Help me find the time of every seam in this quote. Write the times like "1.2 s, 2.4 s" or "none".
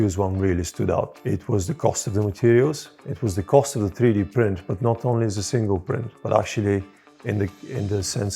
1.2 s, 6.1 s